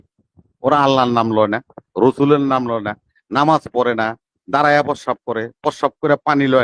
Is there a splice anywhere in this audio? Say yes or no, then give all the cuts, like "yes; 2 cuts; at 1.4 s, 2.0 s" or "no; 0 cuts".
no; 0 cuts